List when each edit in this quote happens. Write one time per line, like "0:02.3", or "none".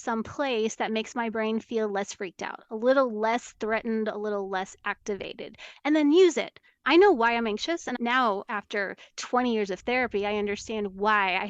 0:06.8
0:08.0